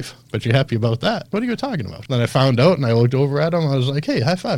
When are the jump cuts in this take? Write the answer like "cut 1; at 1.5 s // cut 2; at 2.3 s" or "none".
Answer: cut 1; at 1.5 s

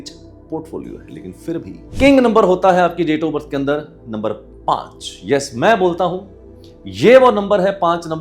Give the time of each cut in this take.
cut 1; at 1.8 s

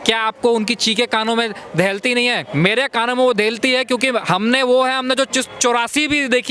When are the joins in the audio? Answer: cut 1; at 2.4 s

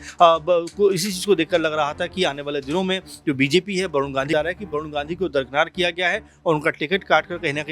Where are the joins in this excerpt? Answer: cut 1; at 4.3 s

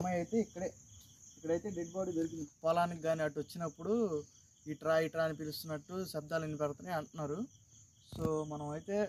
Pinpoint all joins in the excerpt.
cut 1; at 2.5 s

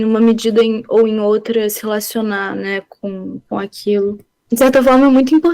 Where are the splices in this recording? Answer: cut 1; at 4.3 s

